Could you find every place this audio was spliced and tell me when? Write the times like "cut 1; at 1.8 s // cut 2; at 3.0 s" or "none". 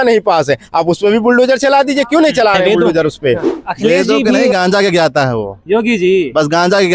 cut 1; at 4.5 s